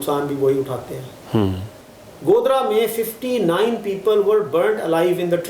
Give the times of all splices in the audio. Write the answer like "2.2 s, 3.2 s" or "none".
1.7 s